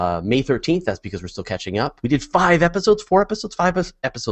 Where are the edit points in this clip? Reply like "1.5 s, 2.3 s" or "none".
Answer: 2.1 s